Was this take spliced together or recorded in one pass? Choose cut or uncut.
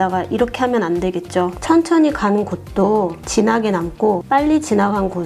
cut